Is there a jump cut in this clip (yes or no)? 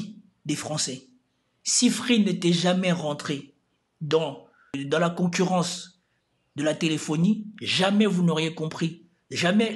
no